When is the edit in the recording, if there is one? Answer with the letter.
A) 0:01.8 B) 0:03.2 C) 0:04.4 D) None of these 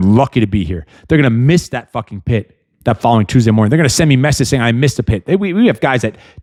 D